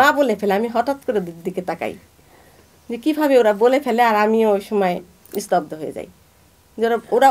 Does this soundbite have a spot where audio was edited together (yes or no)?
no